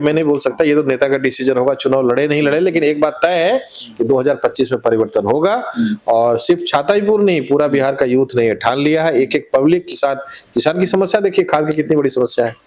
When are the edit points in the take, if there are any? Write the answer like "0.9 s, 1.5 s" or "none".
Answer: none